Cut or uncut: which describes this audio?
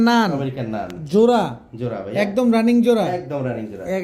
uncut